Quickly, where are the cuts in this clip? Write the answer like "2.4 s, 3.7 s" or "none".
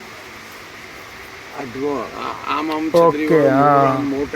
none